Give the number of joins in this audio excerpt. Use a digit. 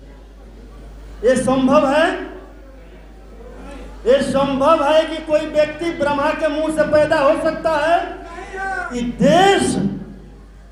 1